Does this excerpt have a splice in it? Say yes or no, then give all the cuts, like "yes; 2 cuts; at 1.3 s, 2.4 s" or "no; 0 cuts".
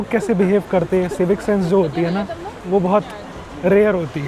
no; 0 cuts